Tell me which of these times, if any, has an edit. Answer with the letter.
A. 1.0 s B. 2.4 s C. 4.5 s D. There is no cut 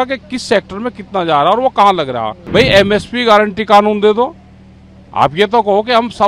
B